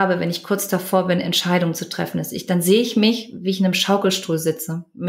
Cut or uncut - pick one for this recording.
uncut